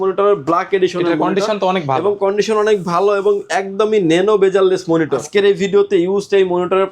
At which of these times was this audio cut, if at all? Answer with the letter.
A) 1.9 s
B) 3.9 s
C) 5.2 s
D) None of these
C